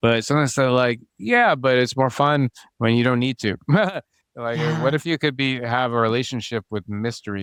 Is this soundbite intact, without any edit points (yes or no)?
yes